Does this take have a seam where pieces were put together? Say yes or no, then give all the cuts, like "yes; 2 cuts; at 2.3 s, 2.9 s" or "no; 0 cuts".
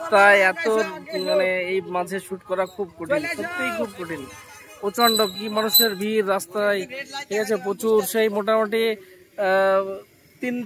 no; 0 cuts